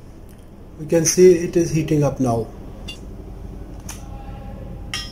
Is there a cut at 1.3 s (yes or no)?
no